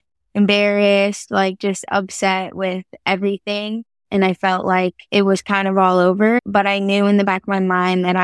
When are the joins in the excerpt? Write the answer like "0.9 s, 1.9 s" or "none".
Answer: 5.0 s, 6.4 s